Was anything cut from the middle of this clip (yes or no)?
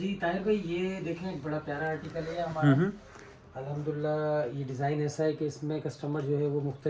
no